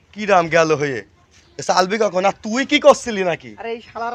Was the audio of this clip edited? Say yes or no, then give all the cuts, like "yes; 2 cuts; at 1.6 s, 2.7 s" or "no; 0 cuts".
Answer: no; 0 cuts